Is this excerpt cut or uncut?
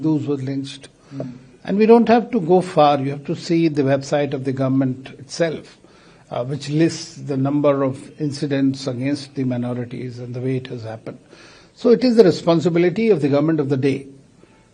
uncut